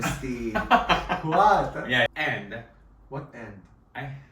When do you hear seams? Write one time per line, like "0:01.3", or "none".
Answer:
0:02.1